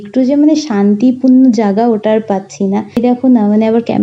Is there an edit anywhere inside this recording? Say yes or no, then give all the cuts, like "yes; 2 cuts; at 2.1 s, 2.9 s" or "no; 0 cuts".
yes; 1 cut; at 3.0 s